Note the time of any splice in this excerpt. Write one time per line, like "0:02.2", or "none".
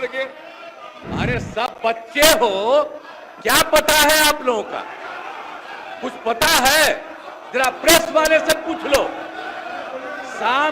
0:00.9